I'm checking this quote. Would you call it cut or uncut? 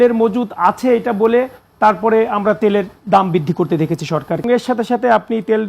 cut